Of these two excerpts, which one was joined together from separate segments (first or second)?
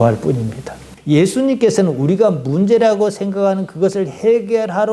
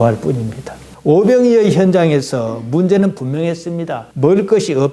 first